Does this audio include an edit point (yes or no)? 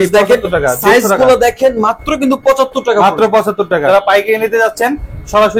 yes